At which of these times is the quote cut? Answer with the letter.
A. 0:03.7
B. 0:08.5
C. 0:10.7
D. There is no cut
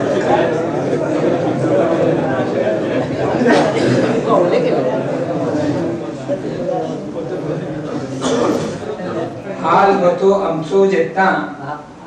D